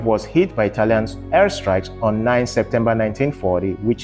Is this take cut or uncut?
uncut